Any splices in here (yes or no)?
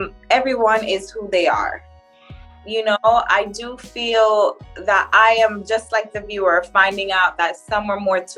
no